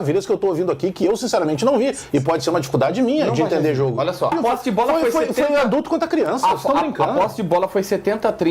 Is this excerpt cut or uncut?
cut